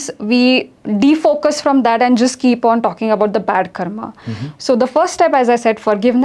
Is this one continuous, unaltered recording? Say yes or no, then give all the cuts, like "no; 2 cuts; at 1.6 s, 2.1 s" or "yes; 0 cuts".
yes; 0 cuts